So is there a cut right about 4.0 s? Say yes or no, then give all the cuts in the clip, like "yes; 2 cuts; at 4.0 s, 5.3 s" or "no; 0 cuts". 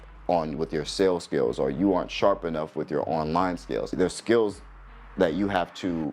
yes; 1 cut; at 4.0 s